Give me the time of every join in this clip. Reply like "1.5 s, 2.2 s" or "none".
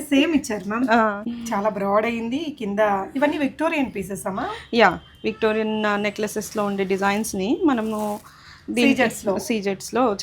1.3 s